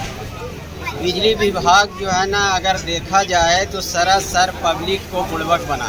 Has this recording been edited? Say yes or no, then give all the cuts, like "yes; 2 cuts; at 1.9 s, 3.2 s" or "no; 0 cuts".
no; 0 cuts